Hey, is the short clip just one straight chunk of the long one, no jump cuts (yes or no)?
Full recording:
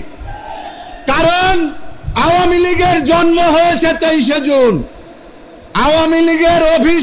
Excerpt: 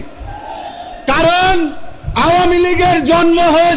yes